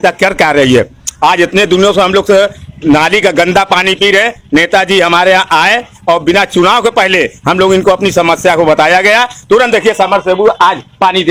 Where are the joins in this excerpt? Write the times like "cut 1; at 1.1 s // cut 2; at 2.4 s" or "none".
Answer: none